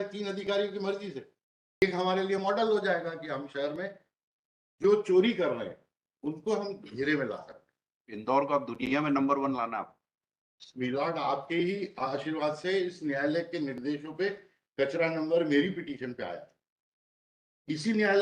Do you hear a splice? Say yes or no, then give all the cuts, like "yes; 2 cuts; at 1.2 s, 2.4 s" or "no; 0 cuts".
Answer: yes; 1 cut; at 1.8 s